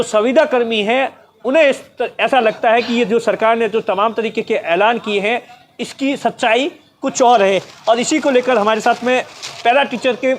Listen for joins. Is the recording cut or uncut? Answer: uncut